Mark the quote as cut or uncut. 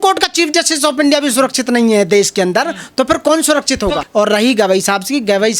cut